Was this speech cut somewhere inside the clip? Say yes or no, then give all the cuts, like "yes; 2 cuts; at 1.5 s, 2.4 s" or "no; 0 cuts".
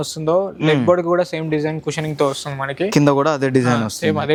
no; 0 cuts